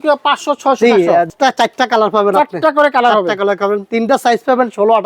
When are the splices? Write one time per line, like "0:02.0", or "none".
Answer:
0:01.3
0:03.9